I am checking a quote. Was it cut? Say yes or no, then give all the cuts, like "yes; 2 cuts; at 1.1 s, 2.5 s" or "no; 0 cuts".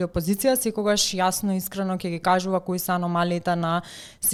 no; 0 cuts